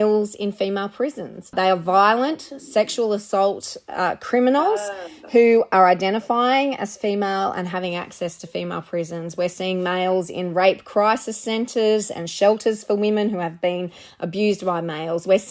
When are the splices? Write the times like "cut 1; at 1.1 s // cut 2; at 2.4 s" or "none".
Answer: cut 1; at 1.5 s

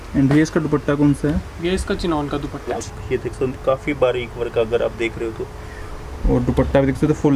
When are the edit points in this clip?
cut 1; at 2.9 s

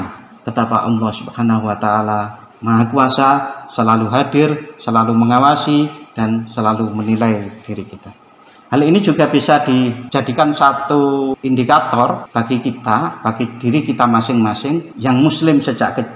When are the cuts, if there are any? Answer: cut 1; at 10.0 s // cut 2; at 11.4 s // cut 3; at 12.2 s // cut 4; at 14.9 s

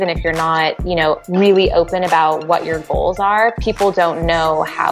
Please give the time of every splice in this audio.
cut 1; at 1.2 s

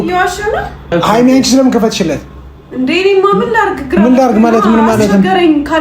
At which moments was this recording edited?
cut 1; at 0.9 s

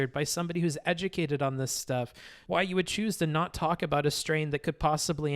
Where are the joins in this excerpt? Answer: cut 1; at 2.3 s

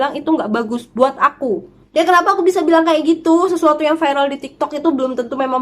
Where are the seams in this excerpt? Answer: cut 1; at 1.8 s

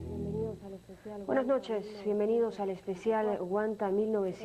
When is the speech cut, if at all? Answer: none

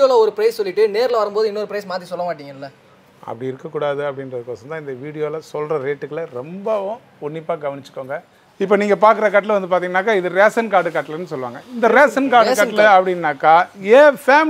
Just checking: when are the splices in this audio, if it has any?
cut 1; at 8.4 s

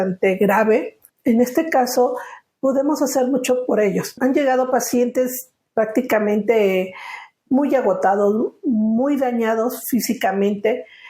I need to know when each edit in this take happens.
cut 1; at 1.0 s // cut 2; at 4.1 s

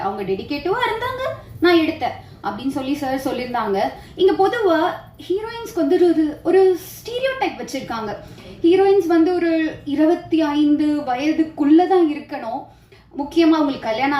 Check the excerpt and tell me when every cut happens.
cut 1; at 4.0 s

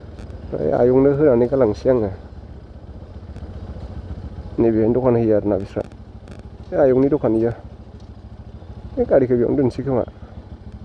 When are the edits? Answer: none

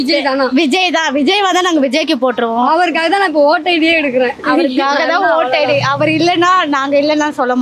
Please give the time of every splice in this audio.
none

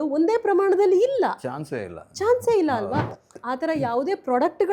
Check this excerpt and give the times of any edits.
cut 1; at 3.2 s

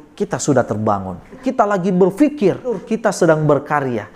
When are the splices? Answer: cut 1; at 1.4 s // cut 2; at 2.8 s

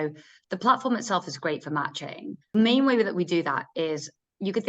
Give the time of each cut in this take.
cut 1; at 2.5 s

